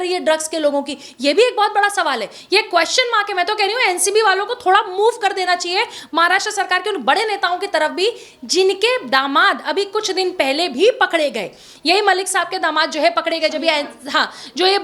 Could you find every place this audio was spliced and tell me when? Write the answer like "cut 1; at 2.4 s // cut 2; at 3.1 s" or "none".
none